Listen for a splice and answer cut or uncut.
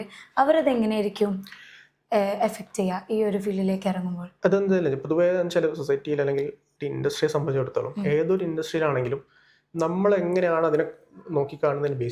uncut